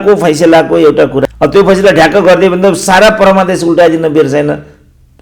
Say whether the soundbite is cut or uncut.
cut